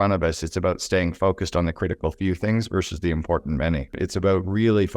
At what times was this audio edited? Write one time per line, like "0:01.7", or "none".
0:03.9